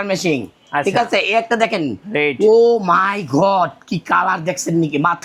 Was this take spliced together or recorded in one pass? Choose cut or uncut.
uncut